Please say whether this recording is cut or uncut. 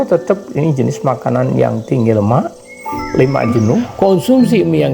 cut